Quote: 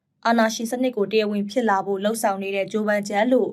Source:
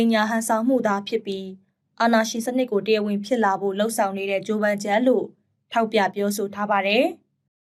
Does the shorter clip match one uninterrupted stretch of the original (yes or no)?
yes